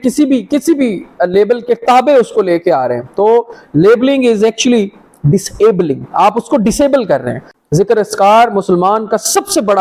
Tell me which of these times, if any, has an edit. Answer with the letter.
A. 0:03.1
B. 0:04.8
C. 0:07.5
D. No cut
C